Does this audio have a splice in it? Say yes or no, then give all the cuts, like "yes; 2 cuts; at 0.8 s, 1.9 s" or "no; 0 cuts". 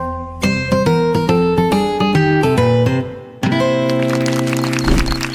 no; 0 cuts